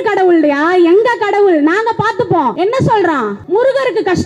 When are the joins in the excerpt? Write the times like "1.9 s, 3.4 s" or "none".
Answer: 2.5 s, 3.4 s